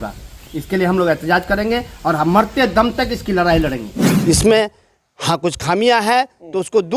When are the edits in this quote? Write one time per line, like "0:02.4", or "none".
0:04.0